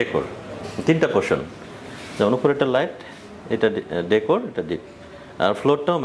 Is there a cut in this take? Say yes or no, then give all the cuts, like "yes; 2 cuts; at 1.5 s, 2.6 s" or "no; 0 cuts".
no; 0 cuts